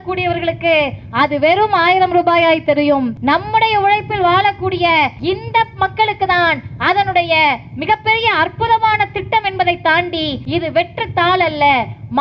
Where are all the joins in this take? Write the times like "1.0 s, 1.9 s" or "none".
3.1 s, 5.2 s, 10.4 s

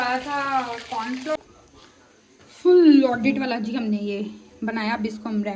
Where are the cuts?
1.4 s

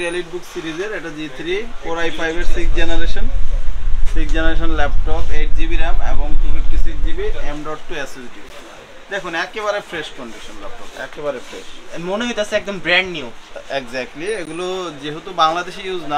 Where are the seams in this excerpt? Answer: none

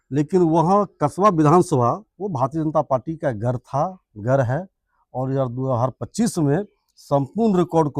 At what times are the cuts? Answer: none

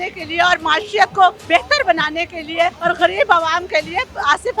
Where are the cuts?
1.4 s, 2.8 s

